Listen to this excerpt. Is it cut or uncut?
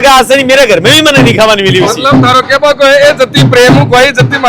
uncut